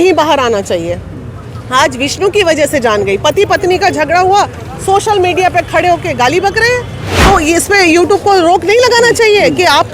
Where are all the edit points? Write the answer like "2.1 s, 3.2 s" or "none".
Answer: 7.1 s